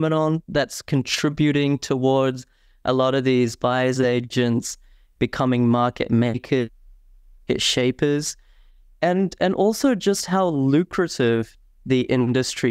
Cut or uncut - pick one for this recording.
uncut